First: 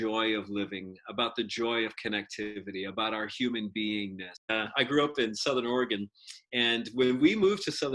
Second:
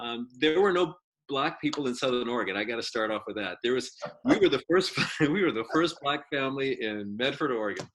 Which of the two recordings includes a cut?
first; 1 cut; at 4.5 s

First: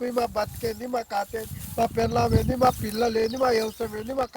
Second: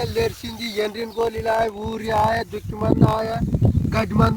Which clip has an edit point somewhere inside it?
first; 1 cut; at 1.9 s

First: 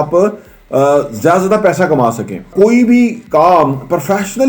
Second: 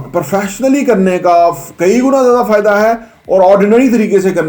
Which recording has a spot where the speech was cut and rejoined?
first; 1 cut; at 2.5 s

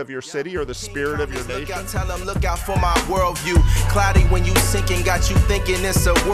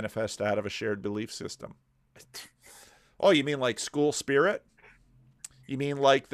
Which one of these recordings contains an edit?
first; 1 cut; at 1.6 s

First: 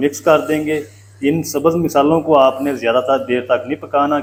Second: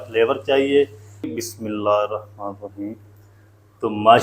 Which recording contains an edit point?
second; 1 cut; at 1.3 s

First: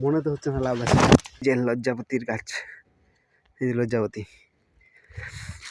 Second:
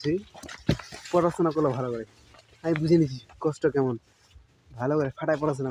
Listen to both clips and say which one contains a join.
first; 1 cut; at 1.4 s

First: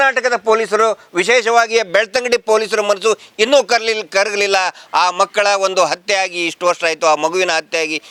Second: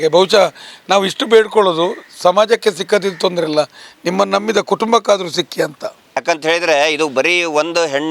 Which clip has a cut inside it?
second; 1 cut; at 6.2 s

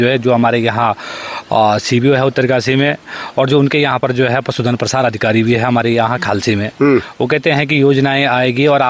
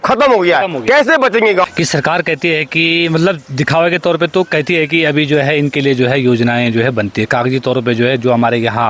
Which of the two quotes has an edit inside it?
second; 1 cut; at 1.7 s

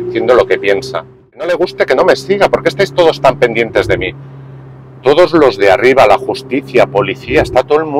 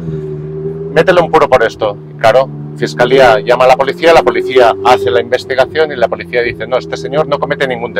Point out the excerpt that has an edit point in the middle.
first; 1 cut; at 1.5 s

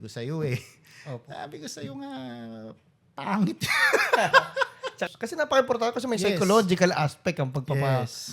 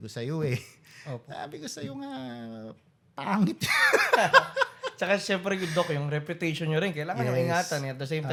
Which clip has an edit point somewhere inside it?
first; 1 cut; at 5.0 s

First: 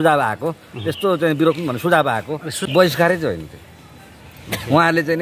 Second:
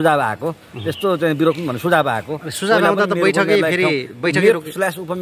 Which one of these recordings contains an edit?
first; 1 cut; at 2.5 s

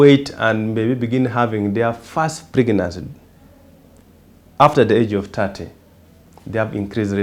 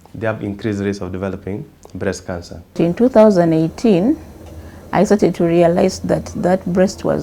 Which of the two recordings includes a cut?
second; 1 cut; at 2.8 s

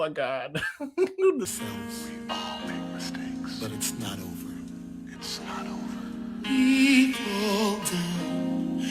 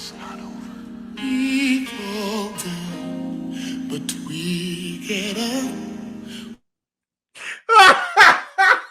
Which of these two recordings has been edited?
first; 1 cut; at 1.5 s

